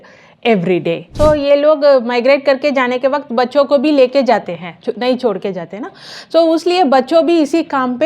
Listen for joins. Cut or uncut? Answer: cut